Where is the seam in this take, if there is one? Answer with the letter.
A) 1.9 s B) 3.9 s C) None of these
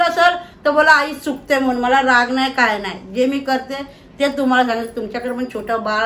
C